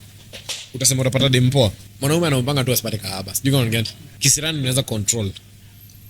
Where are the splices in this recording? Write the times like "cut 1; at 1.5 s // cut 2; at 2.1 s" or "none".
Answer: cut 1; at 1.9 s // cut 2; at 4.0 s